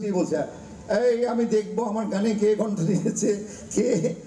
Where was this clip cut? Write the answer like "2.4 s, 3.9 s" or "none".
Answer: none